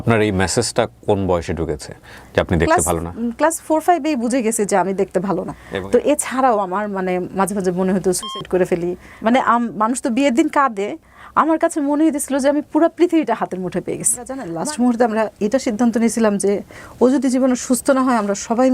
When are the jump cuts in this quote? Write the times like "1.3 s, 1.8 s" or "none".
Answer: 5.6 s, 9.1 s, 14.4 s